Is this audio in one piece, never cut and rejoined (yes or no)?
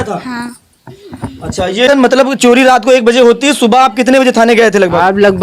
no